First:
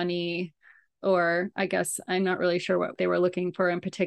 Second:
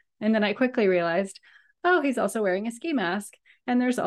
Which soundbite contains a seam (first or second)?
first